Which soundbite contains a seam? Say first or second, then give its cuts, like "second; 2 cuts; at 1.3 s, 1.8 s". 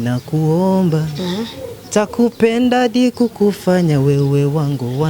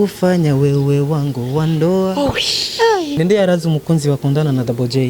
second; 1 cut; at 3.1 s